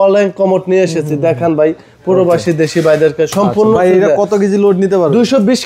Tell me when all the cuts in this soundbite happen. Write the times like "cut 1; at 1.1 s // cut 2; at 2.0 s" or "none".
none